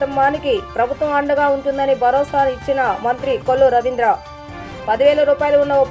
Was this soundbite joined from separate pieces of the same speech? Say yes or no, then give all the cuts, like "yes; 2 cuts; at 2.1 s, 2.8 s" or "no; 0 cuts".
no; 0 cuts